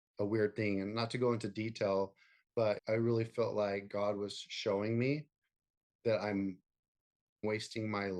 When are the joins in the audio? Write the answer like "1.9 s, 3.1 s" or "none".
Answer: 2.8 s, 7.4 s